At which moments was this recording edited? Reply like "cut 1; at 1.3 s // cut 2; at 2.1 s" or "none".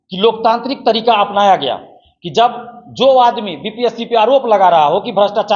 none